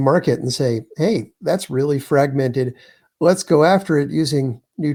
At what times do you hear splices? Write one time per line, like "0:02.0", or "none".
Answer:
none